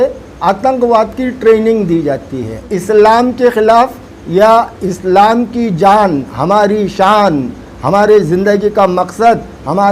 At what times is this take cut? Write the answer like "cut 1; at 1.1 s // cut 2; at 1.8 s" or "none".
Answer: cut 1; at 2.7 s